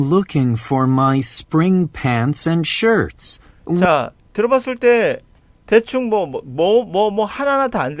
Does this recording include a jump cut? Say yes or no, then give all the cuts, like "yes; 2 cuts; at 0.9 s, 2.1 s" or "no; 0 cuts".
no; 0 cuts